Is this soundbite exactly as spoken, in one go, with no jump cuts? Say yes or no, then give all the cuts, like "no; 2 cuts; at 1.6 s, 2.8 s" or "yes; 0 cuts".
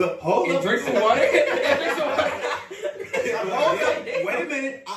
yes; 0 cuts